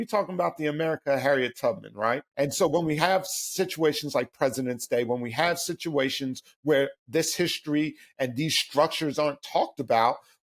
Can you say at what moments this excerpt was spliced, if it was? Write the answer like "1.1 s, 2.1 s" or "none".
2.3 s